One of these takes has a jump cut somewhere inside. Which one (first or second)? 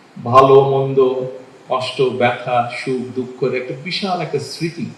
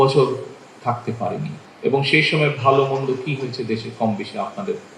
second